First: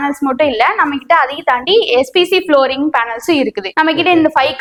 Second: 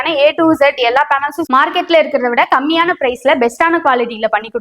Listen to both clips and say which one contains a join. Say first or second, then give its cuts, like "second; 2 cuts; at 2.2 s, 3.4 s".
second; 1 cut; at 1.5 s